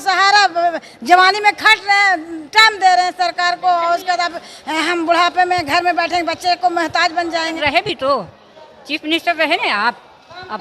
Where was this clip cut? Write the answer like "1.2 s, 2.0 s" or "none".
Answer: 7.6 s